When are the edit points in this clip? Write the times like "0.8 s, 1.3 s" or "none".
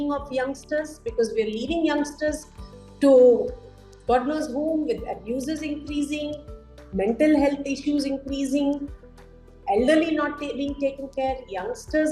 none